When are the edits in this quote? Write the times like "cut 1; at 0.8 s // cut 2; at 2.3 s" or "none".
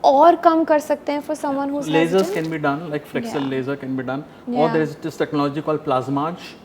none